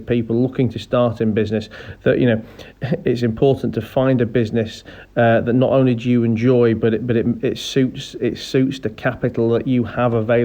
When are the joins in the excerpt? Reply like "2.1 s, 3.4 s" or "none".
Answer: none